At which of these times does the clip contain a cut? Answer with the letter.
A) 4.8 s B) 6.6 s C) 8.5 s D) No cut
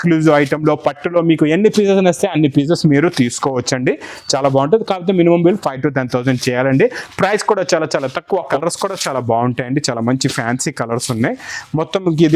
C